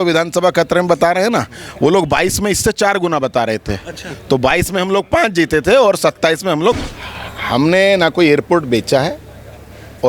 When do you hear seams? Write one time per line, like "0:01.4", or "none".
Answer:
0:06.8